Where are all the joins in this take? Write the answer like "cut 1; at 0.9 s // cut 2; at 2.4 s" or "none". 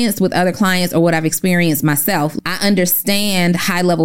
cut 1; at 2.3 s